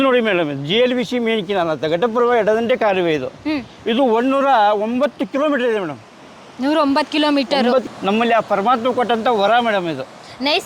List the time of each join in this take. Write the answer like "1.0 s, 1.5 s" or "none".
7.9 s